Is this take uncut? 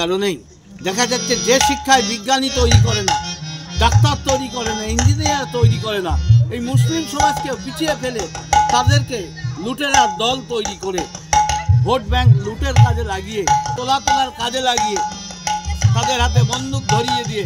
no; 1 cut; at 13.8 s

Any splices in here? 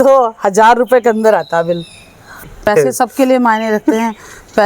yes; 1 cut; at 2.5 s

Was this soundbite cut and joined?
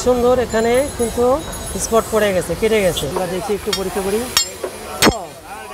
yes; 1 cut; at 3.1 s

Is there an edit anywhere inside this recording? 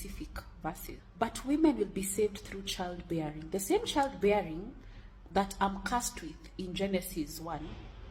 yes; 1 cut; at 1.0 s

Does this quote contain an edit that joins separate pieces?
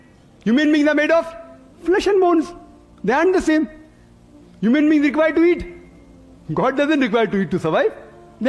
no; 0 cuts

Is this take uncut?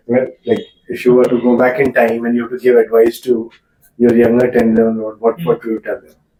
yes; 0 cuts

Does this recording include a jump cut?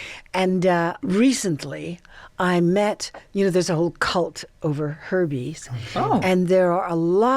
yes; 1 cut; at 1.0 s

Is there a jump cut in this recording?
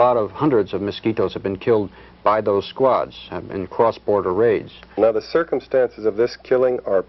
yes; 1 cut; at 5.0 s

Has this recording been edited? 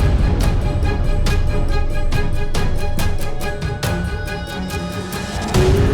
no; 0 cuts

